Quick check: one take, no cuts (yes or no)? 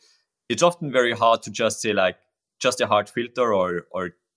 yes